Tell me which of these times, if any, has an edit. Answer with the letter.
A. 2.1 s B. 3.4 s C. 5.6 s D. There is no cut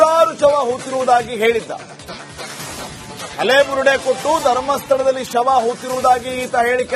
D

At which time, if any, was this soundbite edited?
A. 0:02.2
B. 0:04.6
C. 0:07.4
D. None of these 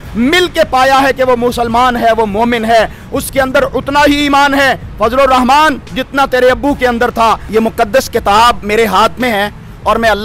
C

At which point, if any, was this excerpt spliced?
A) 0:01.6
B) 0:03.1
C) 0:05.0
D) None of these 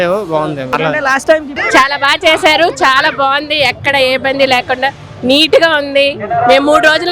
A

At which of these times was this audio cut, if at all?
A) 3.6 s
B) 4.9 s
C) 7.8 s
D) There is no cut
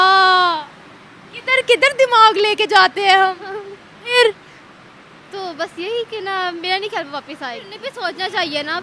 C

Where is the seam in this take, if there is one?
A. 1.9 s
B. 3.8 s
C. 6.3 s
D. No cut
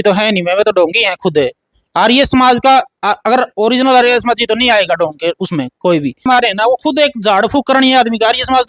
C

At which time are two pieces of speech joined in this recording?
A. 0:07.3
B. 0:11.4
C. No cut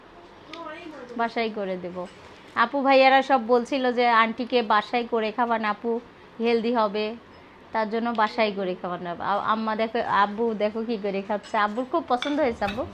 C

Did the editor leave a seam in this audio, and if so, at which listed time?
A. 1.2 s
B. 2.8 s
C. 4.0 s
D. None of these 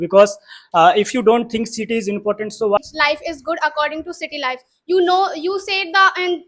B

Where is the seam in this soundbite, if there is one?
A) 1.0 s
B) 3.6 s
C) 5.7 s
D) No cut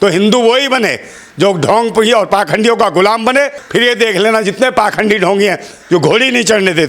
B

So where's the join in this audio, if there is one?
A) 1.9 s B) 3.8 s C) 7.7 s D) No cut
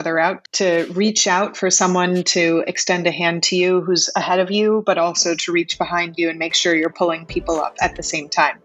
C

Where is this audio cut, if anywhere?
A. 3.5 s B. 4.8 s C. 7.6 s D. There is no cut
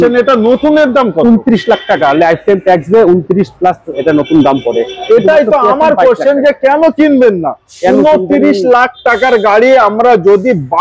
D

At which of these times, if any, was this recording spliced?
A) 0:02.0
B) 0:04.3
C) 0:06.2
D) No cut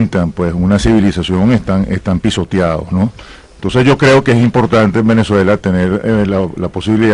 D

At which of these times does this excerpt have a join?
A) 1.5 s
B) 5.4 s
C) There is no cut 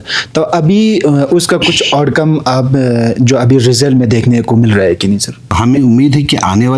B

